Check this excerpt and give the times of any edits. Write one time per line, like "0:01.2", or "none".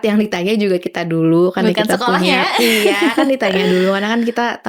none